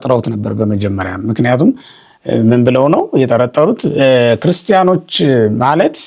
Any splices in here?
no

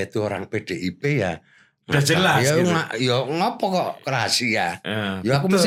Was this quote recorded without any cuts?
yes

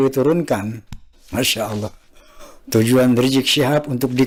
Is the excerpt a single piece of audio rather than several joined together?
yes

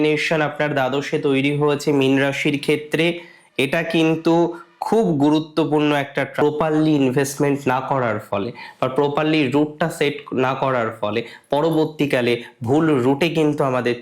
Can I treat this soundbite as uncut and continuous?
no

